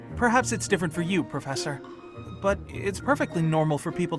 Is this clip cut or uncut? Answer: uncut